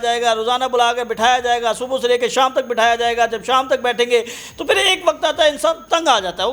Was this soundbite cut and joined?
no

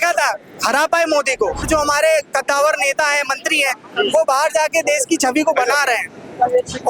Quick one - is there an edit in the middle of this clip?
yes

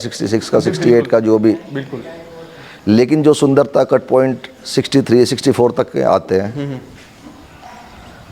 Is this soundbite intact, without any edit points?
yes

